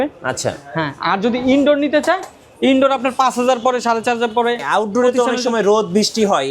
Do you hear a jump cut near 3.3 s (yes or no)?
no